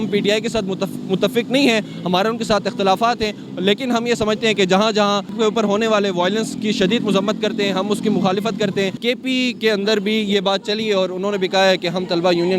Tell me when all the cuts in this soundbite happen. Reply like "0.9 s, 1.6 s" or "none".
5.3 s, 9.0 s